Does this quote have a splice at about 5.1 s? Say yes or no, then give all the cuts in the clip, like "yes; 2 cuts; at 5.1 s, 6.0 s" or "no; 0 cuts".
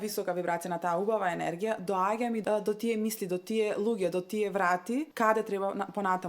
yes; 2 cuts; at 2.4 s, 5.1 s